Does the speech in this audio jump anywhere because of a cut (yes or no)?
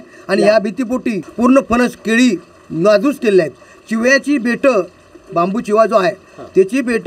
yes